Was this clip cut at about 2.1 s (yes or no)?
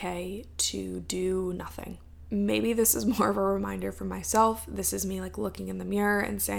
no